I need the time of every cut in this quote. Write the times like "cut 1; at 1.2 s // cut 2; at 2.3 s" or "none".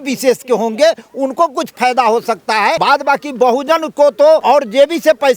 cut 1; at 2.8 s // cut 2; at 4.4 s